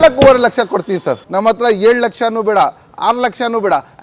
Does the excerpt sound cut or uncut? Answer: cut